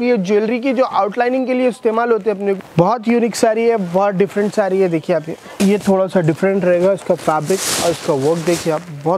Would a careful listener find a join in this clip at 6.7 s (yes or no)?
no